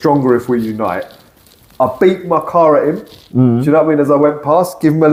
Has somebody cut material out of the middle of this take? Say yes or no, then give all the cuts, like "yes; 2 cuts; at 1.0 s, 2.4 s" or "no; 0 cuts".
no; 0 cuts